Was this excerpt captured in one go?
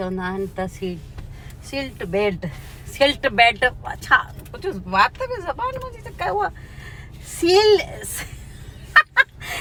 yes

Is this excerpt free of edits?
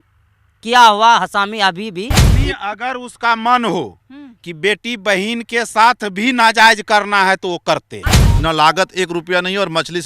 no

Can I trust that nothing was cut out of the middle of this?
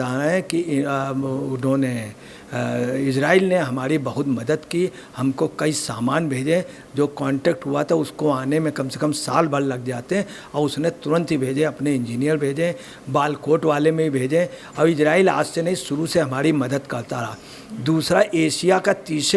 yes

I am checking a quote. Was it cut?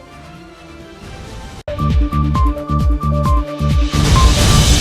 yes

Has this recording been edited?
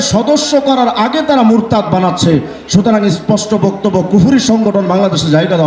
no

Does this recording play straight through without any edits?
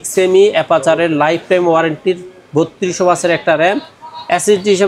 yes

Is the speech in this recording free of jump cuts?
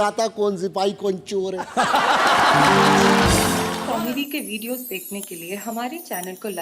no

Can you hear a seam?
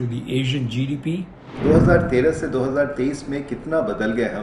yes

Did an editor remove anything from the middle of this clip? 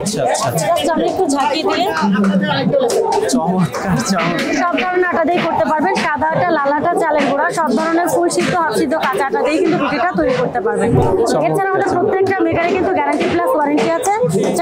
no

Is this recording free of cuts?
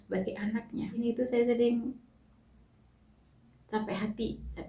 no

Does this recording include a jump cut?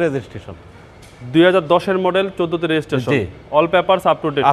no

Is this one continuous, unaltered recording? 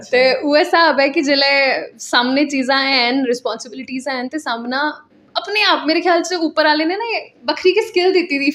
yes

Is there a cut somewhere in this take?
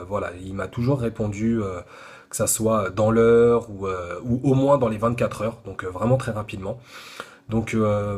no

